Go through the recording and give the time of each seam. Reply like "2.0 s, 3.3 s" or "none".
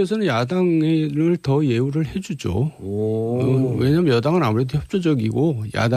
4.8 s